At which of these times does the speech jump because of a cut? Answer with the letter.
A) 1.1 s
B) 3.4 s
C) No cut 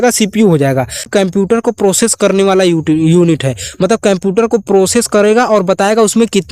A